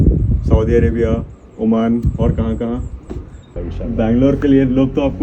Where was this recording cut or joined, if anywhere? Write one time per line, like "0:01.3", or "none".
0:03.6